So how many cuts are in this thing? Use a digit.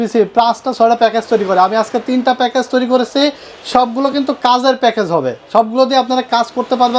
0